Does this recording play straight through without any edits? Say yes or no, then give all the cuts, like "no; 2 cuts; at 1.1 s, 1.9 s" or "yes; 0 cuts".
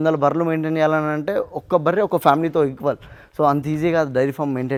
yes; 0 cuts